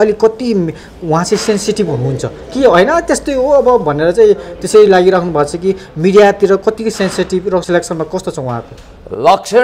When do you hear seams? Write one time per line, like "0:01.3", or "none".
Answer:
0:07.6